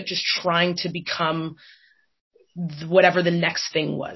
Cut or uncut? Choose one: uncut